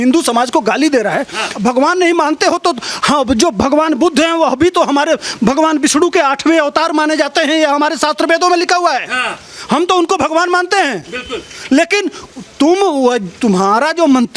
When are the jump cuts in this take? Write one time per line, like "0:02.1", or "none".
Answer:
none

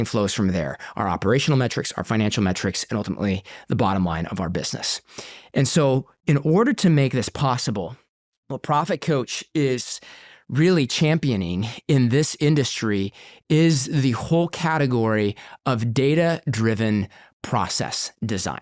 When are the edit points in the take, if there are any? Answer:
none

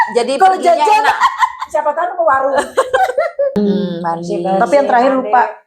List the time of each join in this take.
0:03.5

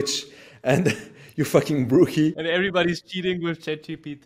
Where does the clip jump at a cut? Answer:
0:02.6

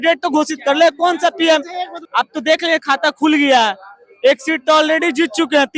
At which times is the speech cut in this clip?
0:02.0

